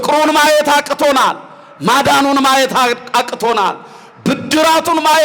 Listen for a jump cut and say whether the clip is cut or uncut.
uncut